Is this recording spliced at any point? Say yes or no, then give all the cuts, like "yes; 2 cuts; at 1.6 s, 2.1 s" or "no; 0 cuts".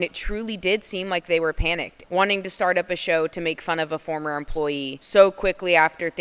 yes; 2 cuts; at 1.9 s, 5.0 s